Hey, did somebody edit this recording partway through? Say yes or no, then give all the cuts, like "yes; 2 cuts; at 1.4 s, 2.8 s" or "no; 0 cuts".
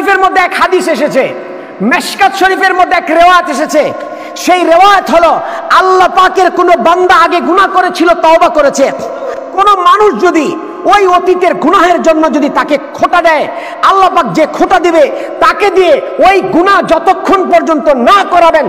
no; 0 cuts